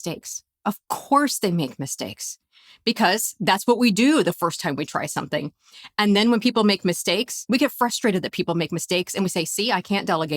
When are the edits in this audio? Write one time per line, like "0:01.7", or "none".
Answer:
0:07.4
0:09.5

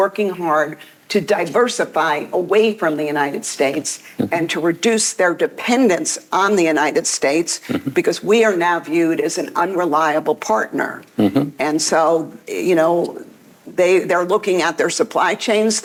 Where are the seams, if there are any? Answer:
none

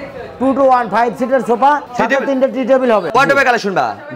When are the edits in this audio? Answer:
0:01.9
0:03.1

